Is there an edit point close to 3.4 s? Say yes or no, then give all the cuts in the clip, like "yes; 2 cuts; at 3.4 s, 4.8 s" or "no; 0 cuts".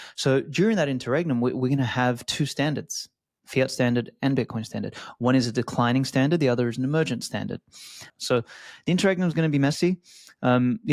no; 1 cut; at 8.0 s